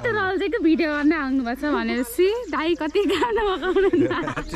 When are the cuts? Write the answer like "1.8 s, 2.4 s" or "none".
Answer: none